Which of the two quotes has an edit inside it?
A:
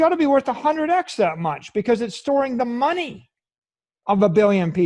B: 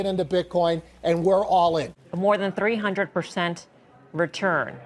B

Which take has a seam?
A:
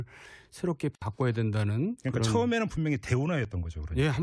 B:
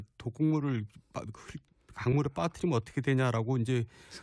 A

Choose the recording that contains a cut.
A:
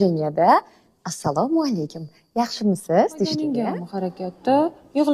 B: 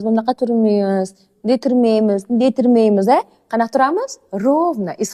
A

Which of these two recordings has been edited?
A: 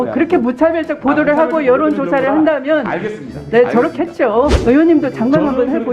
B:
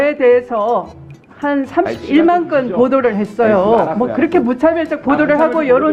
A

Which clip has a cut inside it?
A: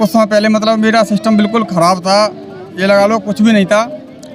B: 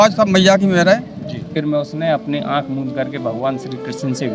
B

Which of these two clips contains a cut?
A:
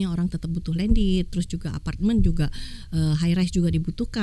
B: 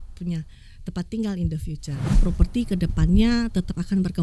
B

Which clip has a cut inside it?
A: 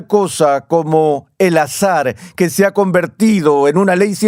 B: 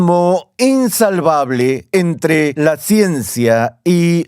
B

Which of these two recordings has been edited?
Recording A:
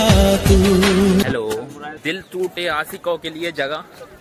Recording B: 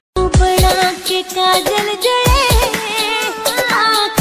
A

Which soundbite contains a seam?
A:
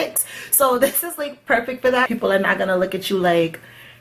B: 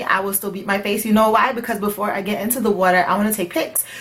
A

